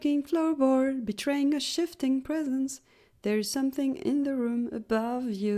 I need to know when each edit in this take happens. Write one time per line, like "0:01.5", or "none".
none